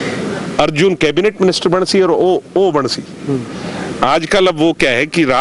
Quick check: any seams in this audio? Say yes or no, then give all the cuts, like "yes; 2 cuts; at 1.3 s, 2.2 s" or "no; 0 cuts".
no; 0 cuts